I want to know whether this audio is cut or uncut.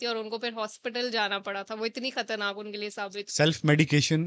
uncut